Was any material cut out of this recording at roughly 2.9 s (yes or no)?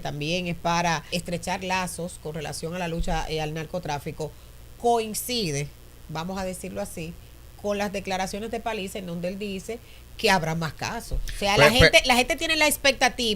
no